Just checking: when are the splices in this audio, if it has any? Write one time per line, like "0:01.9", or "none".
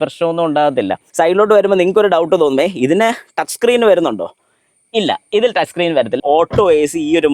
0:01.0
0:06.2